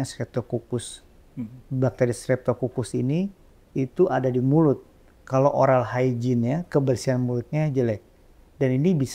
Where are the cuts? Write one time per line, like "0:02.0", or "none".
none